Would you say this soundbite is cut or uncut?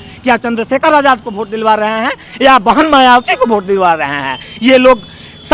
uncut